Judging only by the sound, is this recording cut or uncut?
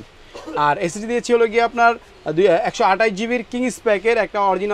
uncut